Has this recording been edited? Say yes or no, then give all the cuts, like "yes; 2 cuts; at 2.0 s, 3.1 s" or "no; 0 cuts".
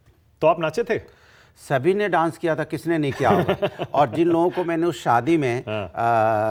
no; 0 cuts